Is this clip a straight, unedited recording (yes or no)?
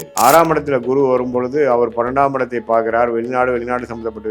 yes